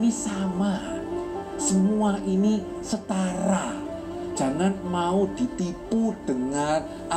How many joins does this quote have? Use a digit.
0